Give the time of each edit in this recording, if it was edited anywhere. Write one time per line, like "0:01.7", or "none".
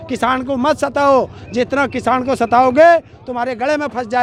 none